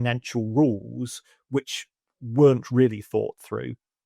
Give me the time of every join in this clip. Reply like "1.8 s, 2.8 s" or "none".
none